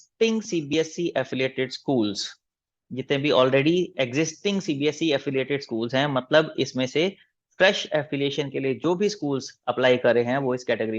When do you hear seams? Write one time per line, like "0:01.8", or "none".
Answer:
none